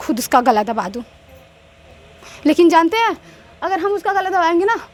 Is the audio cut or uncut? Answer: uncut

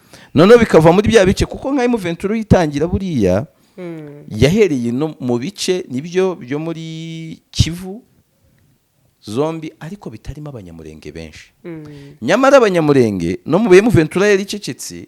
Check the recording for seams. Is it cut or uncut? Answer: uncut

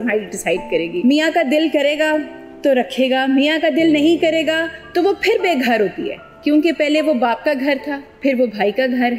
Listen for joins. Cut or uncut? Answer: cut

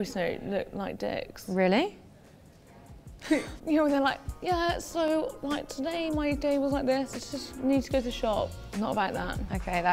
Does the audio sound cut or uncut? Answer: cut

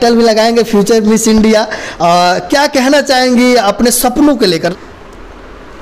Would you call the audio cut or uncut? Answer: cut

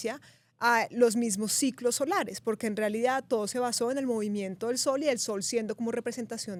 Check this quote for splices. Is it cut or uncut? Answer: uncut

